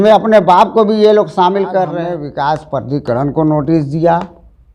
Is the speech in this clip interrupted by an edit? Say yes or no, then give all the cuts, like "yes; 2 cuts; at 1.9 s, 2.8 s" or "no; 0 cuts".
yes; 1 cut; at 2.1 s